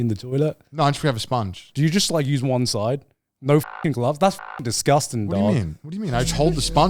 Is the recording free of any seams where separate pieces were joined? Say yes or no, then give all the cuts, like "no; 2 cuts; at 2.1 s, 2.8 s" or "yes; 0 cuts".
no; 1 cut; at 1.6 s